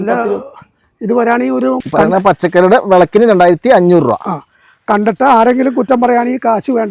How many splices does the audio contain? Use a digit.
1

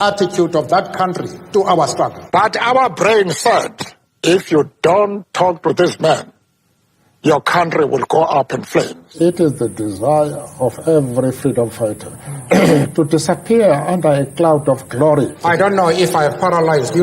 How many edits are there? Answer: 3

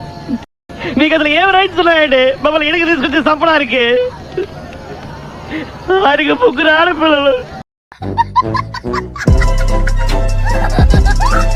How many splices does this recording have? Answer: 0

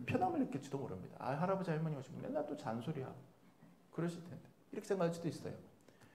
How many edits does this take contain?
0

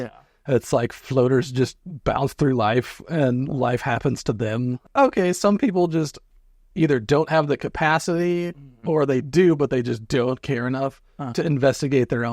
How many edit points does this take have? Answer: 1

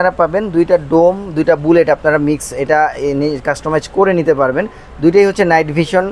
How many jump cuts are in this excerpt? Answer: 0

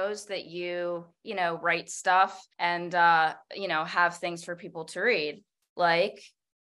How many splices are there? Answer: 2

